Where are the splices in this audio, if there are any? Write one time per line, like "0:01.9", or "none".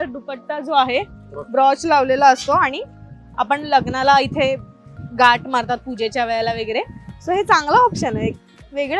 none